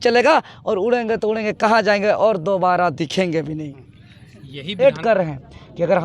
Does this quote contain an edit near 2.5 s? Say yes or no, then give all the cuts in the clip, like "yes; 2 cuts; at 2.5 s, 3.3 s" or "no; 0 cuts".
no; 1 cut; at 4.8 s